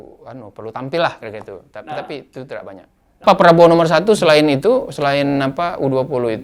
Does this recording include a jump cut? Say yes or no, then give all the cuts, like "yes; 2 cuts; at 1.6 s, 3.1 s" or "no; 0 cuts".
yes; 1 cut; at 3.2 s